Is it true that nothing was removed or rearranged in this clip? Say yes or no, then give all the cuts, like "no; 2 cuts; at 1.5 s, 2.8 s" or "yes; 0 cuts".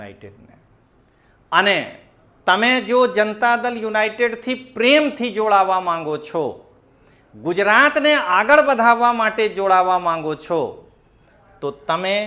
yes; 0 cuts